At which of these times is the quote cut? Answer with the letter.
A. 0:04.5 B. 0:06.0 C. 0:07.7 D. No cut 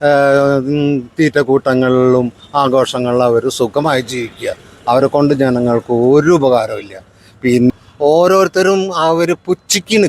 C